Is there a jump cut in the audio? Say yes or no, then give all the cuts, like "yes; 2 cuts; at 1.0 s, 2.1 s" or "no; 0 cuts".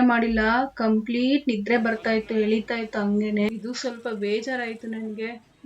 yes; 1 cut; at 3.5 s